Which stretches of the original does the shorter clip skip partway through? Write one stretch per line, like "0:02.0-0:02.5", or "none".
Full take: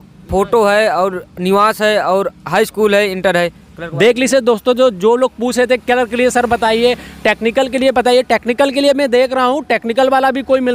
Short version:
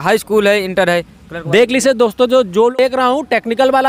0:05.2-0:09.1